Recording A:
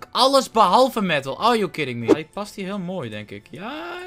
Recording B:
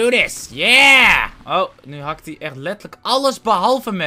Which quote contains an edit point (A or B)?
A